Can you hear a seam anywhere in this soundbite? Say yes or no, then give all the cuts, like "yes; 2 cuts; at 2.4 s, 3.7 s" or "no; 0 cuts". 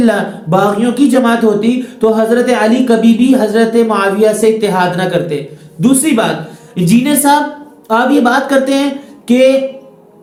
no; 0 cuts